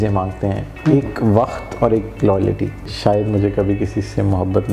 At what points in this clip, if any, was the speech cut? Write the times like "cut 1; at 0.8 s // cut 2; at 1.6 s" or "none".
cut 1; at 2.9 s